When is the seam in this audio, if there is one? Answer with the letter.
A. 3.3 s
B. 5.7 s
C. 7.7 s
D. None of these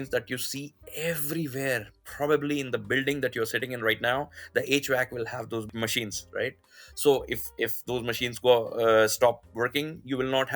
B